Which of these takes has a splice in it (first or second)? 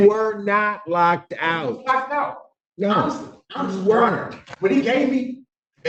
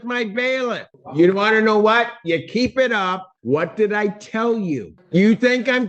second